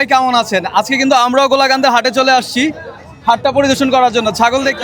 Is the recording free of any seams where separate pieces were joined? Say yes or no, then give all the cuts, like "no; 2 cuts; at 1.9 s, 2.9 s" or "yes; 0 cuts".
yes; 0 cuts